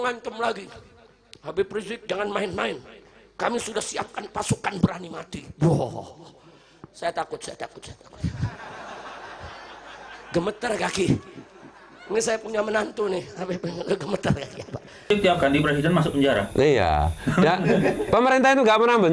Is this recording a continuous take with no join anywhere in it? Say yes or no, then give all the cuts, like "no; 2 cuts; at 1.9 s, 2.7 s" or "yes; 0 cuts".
no; 1 cut; at 15.1 s